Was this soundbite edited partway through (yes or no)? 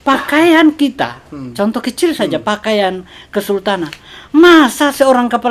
no